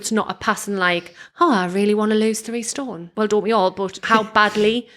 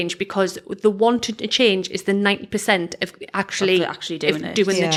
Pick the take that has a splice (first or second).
first